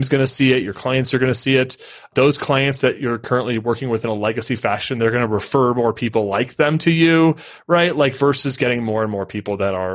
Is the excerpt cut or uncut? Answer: uncut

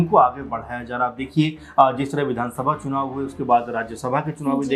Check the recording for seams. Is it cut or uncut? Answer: uncut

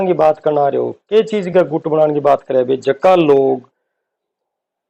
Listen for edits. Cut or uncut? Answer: uncut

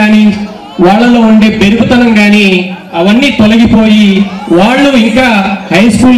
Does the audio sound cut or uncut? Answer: uncut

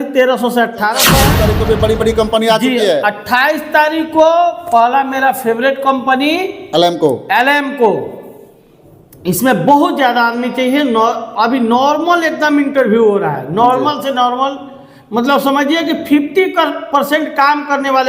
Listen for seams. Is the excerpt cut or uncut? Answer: cut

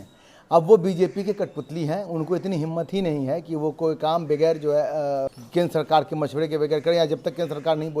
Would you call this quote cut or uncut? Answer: cut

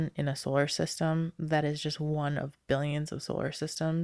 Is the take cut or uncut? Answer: uncut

